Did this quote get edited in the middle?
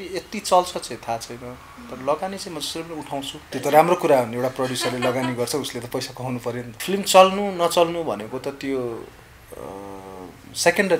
yes; 2 cuts; at 3.4 s, 6.7 s

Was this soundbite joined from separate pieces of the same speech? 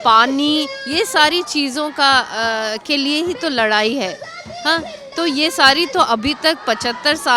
no; 0 cuts

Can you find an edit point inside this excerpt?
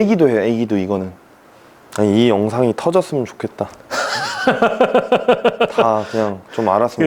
yes; 1 cut; at 1.2 s

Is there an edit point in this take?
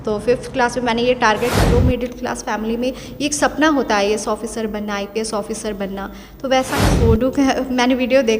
yes; 2 cuts; at 1.5 s, 6.8 s

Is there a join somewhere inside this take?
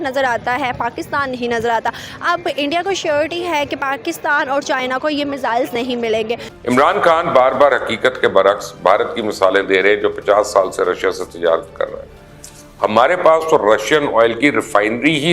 yes; 1 cut; at 6.5 s

